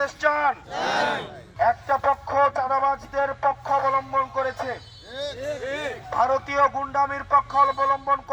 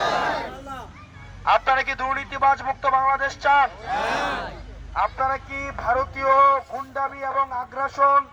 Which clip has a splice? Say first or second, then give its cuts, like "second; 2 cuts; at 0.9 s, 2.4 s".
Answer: first; 1 cut; at 1.4 s